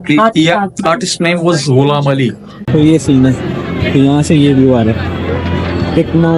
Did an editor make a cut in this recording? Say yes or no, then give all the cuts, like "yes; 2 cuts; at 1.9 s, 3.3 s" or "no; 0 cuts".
yes; 1 cut; at 2.5 s